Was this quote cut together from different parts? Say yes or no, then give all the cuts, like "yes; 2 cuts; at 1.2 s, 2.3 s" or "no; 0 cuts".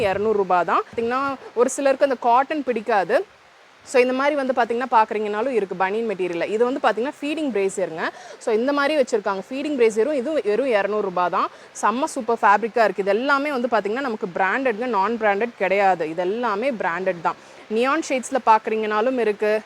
yes; 1 cut; at 1.0 s